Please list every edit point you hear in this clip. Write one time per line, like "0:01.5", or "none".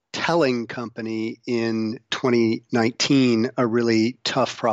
0:02.1